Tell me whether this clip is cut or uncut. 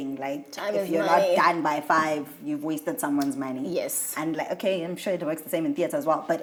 uncut